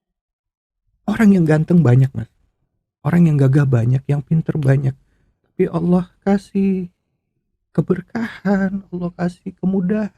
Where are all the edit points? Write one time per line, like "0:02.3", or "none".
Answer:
none